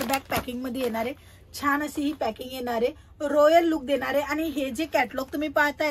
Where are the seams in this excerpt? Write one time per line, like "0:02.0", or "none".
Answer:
none